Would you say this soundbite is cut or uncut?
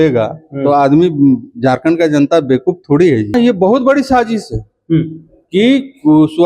cut